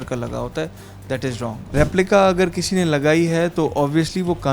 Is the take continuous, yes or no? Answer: no